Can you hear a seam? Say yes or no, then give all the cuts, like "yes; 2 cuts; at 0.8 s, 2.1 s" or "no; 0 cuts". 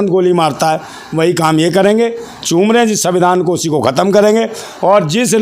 no; 0 cuts